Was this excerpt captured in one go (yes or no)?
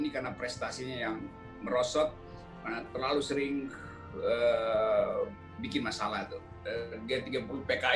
no